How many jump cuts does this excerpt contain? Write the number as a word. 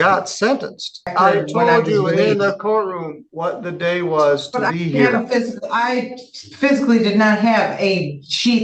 one